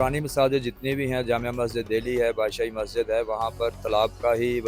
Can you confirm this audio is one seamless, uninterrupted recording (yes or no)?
yes